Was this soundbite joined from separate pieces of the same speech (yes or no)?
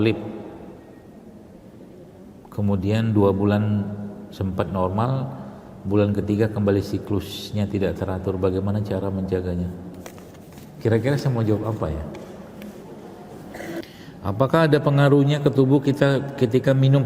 yes